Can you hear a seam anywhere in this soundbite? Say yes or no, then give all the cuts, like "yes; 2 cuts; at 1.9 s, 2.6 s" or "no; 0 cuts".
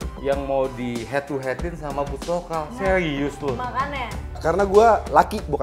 yes; 1 cut; at 4.4 s